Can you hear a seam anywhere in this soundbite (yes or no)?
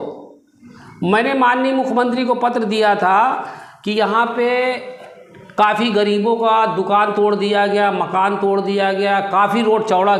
no